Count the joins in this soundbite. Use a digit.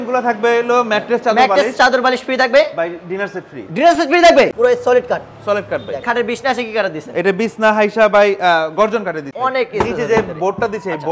3